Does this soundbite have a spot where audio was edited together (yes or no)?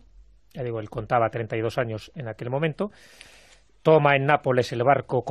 yes